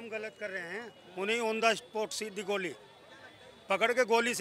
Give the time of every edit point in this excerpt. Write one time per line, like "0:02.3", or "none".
none